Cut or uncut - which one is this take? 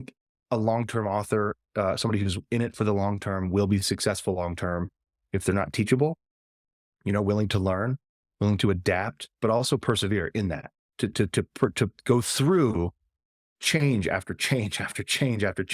uncut